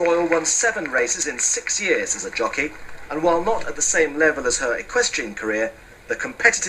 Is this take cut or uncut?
cut